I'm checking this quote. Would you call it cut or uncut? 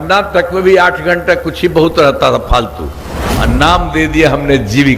cut